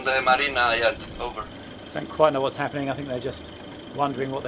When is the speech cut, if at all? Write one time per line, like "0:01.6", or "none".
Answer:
0:01.5